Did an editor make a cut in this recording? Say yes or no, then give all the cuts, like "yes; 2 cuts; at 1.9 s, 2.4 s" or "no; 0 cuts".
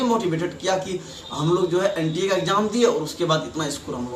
no; 0 cuts